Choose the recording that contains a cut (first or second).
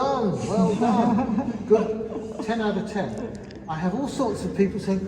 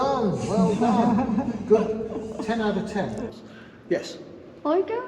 second